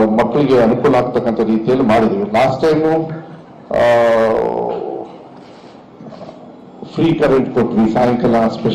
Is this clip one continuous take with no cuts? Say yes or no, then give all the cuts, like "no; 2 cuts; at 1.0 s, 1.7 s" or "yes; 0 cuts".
no; 1 cut; at 1.1 s